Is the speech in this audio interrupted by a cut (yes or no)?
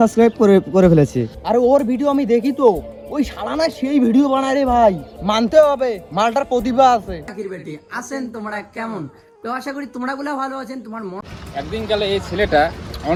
no